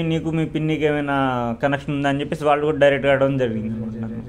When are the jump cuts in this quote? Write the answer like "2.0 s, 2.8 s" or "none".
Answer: none